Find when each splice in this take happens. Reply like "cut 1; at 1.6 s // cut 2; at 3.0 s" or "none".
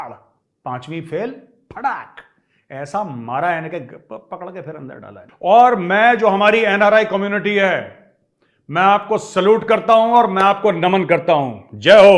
cut 1; at 5.2 s

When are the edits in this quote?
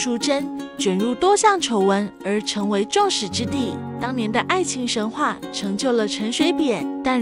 cut 1; at 3.9 s

